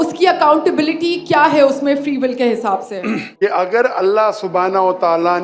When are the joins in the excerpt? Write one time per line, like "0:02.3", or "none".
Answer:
0:03.3